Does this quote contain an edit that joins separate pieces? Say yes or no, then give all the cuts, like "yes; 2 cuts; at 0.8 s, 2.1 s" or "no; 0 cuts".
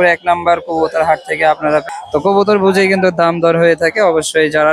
yes; 1 cut; at 1.9 s